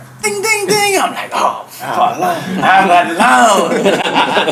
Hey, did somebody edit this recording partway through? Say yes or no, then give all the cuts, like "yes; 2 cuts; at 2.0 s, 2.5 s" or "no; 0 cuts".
no; 0 cuts